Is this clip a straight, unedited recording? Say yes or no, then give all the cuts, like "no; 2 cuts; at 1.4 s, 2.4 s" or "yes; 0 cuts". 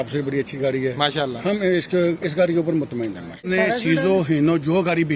no; 1 cut; at 3.5 s